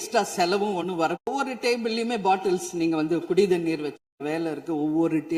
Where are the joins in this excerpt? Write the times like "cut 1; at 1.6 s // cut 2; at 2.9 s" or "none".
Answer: none